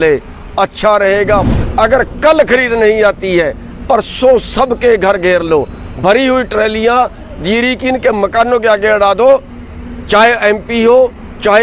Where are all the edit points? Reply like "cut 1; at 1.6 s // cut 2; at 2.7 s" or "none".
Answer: cut 1; at 1.5 s